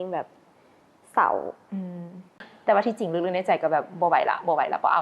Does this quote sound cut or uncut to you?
cut